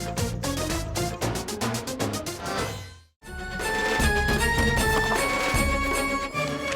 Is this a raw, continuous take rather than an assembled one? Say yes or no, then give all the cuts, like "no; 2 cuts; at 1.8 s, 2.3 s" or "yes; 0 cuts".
no; 1 cut; at 3.5 s